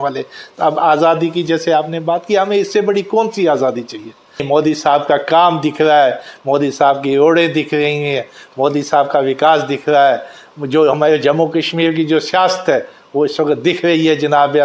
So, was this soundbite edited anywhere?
yes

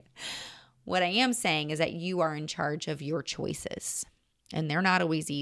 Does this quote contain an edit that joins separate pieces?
no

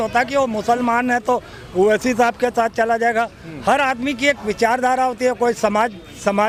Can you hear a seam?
no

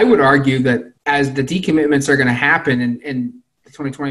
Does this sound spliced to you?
yes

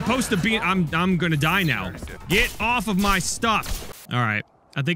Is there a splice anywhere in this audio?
yes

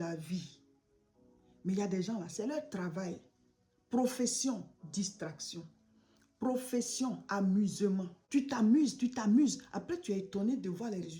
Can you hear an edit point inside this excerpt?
yes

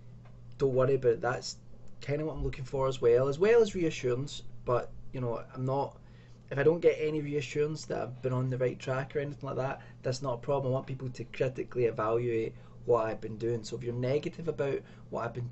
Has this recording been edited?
yes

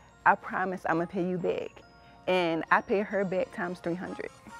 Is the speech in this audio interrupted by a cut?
no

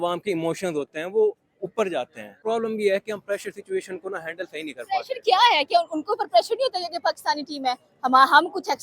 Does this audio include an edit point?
yes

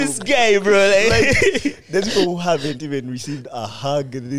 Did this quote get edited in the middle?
no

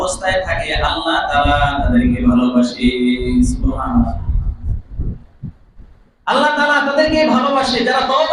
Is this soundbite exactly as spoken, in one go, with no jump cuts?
yes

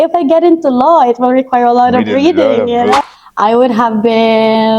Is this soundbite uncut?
no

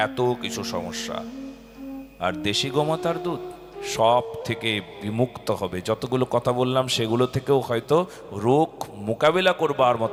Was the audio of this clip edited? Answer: no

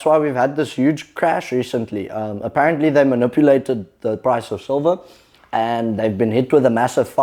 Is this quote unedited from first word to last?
yes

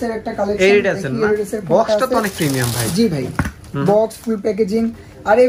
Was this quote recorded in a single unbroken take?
yes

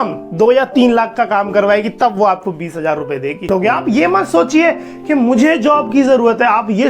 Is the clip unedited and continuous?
no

